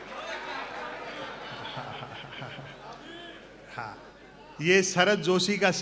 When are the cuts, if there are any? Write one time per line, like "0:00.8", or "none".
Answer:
none